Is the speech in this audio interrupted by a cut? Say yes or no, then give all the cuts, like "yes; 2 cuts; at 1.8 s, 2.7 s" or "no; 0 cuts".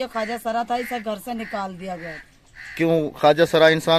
no; 0 cuts